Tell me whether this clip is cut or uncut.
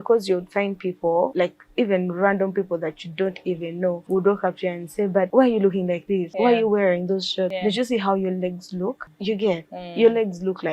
cut